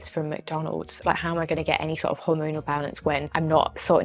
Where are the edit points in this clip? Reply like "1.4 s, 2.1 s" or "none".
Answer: 1.0 s